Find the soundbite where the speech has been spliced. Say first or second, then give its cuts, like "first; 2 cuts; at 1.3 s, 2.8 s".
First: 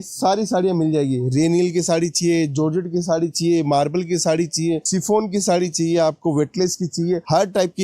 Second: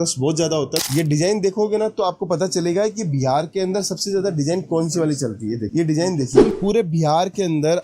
second; 2 cuts; at 0.8 s, 6.4 s